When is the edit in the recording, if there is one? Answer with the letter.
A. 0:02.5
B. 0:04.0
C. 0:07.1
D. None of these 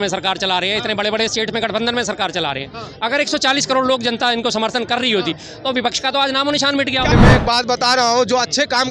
C